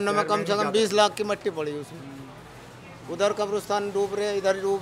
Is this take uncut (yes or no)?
yes